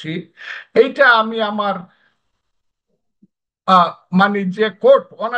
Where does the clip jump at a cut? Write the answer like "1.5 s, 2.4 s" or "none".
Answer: none